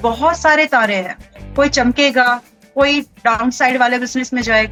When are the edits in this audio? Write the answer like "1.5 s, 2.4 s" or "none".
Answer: none